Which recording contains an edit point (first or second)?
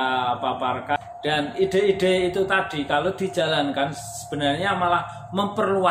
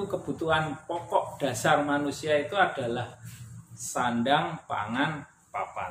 first